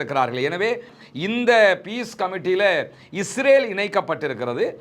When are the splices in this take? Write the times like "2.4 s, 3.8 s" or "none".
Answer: 0.9 s